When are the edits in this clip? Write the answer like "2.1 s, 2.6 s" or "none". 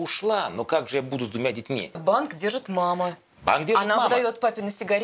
2.0 s